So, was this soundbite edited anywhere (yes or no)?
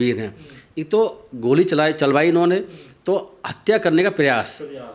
no